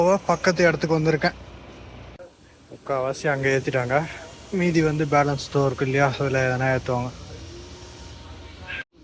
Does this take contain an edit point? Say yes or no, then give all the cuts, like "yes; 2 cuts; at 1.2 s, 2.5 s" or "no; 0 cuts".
no; 0 cuts